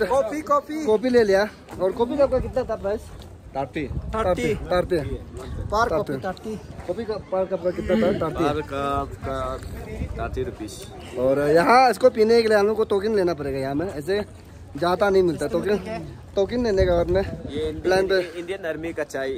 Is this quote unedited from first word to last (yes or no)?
yes